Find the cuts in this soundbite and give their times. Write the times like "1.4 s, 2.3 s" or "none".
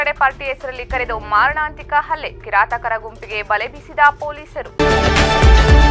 4.5 s